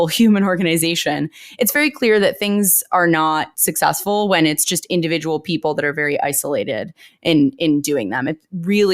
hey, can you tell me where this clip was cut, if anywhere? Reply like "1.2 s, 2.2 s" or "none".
3.5 s